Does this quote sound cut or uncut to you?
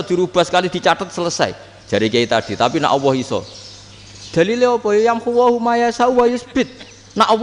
uncut